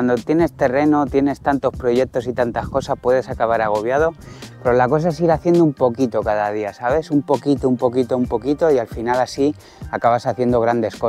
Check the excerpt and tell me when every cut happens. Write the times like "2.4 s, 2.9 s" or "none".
none